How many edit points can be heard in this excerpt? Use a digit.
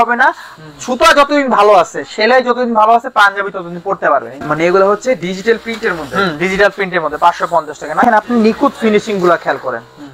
2